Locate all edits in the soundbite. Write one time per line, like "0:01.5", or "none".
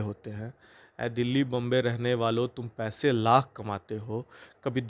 none